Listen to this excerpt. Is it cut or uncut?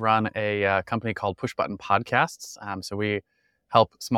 uncut